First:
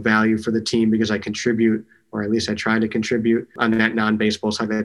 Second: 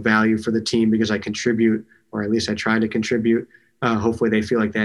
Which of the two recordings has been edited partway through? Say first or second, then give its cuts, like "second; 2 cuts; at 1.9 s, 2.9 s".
first; 1 cut; at 3.6 s